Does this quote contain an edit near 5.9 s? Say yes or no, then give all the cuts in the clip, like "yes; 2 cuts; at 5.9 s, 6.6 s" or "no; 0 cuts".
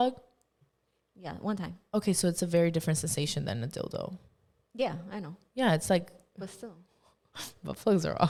no; 0 cuts